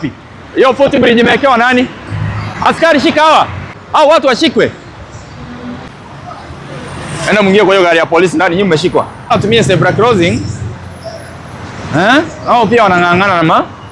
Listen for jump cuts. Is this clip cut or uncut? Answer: cut